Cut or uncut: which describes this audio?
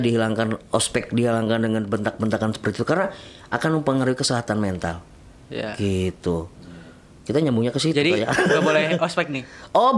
uncut